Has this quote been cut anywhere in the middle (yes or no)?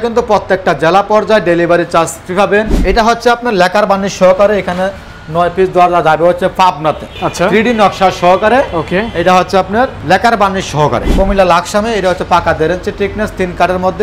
yes